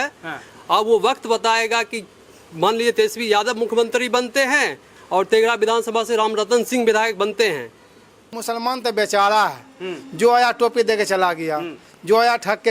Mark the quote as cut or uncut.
cut